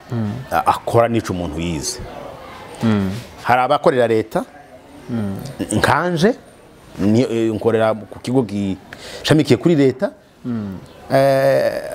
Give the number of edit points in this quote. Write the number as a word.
one